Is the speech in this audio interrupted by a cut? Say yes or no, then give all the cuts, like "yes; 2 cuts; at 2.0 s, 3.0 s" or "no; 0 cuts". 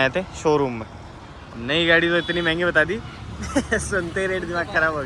no; 0 cuts